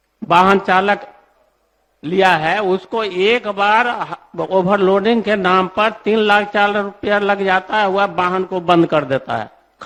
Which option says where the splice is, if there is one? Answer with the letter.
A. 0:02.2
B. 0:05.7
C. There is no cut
C